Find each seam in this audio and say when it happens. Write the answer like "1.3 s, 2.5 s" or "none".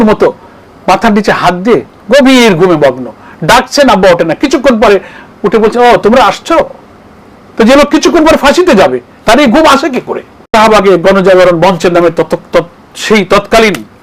10.3 s